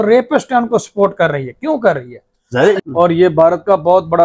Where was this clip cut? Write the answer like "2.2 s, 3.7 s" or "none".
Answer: 2.8 s